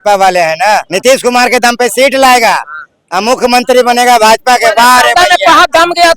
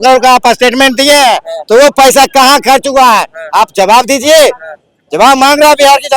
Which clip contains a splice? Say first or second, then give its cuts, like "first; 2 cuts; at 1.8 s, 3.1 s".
first; 1 cut; at 0.9 s